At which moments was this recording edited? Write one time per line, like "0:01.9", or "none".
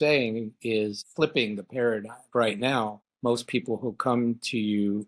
0:01.0
0:02.3
0:03.0